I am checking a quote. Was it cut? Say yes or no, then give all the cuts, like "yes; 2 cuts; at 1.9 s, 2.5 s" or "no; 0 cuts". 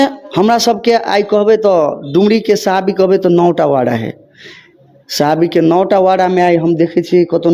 no; 0 cuts